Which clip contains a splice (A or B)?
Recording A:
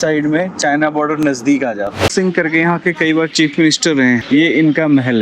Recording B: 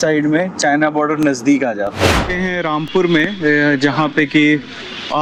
A